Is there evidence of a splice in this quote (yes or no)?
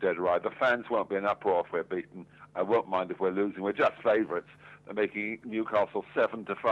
yes